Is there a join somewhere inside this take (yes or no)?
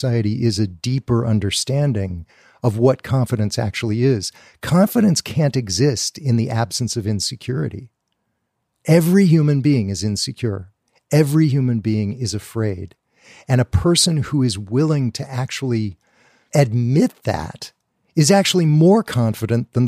no